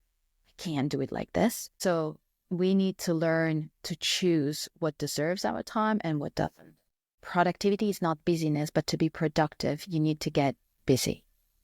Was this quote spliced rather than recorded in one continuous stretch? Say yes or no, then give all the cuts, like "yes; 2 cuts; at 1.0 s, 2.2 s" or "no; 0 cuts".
yes; 2 cuts; at 1.7 s, 7.2 s